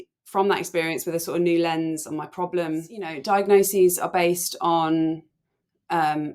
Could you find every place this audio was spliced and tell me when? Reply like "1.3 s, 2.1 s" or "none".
3.2 s